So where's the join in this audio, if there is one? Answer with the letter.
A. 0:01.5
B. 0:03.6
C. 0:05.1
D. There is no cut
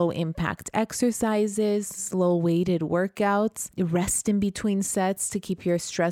B